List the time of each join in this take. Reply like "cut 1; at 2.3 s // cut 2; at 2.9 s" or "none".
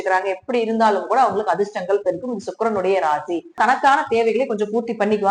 cut 1; at 3.6 s